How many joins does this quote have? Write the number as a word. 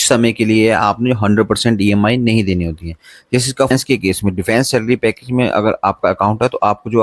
one